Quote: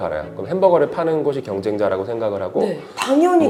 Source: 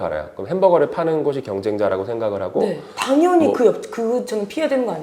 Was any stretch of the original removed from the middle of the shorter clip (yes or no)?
no